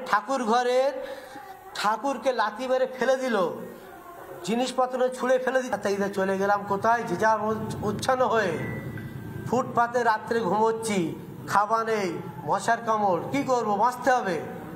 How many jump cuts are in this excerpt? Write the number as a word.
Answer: one